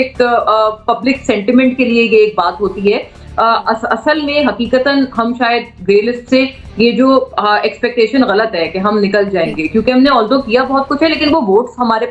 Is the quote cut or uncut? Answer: uncut